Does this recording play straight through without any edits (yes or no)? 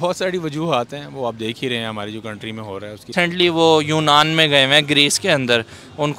no